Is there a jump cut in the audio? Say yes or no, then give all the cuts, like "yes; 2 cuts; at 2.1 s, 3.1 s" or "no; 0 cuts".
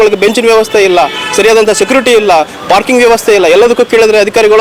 no; 0 cuts